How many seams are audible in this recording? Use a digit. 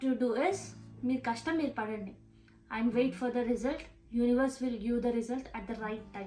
0